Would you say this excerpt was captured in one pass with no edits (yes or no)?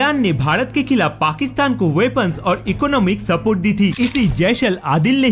no